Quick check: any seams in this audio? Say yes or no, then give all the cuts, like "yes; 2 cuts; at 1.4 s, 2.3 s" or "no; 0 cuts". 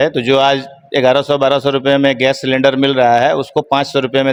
no; 0 cuts